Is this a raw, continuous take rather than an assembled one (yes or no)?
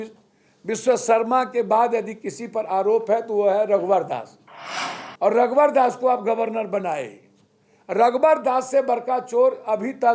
yes